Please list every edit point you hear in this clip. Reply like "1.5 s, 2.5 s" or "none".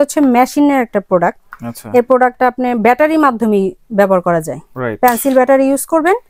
none